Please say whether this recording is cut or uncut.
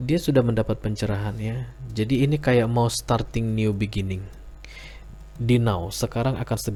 uncut